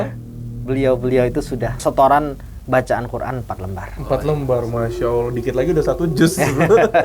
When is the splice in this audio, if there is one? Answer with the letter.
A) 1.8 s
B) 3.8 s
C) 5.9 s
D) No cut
A